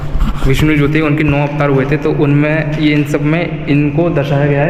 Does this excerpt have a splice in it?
no; 0 cuts

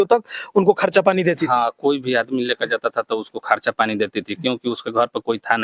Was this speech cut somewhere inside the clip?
no; 0 cuts

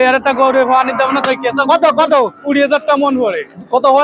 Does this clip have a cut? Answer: no; 0 cuts

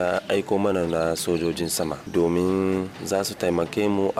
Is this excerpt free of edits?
no; 2 cuts; at 2.0 s, 3.0 s

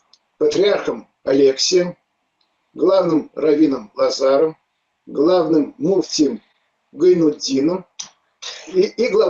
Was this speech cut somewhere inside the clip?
no; 0 cuts

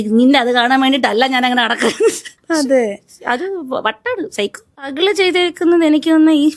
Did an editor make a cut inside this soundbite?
yes; 1 cut; at 4.6 s

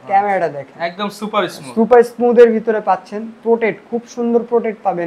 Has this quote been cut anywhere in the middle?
no; 0 cuts

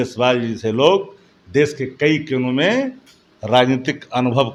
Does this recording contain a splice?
no; 0 cuts

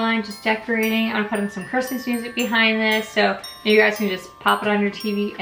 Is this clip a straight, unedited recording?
yes; 0 cuts

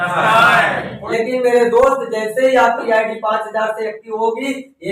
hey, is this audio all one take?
no; 1 cut; at 1.0 s

